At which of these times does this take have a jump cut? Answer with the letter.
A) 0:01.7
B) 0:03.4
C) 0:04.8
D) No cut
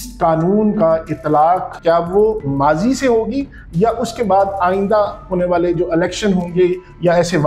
A